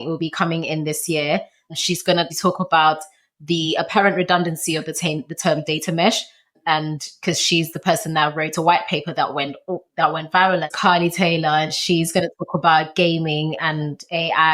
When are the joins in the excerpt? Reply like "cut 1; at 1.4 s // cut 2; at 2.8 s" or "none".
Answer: cut 1; at 1.9 s // cut 2; at 6.5 s // cut 3; at 10.7 s